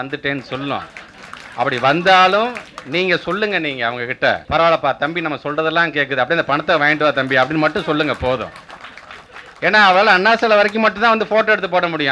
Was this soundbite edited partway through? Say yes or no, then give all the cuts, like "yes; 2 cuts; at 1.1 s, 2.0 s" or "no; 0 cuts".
yes; 1 cut; at 4.4 s